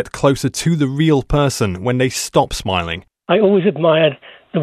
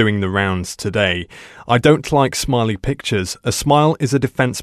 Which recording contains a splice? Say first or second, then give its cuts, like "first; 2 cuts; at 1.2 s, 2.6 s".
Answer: first; 1 cut; at 3.2 s